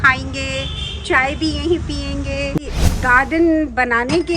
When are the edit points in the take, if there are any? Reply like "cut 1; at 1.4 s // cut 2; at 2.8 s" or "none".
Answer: cut 1; at 2.6 s